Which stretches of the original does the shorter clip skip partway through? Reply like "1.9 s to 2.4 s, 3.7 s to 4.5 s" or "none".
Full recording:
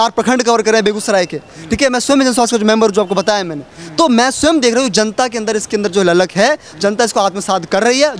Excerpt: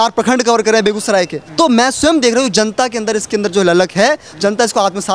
1.4 s to 3.8 s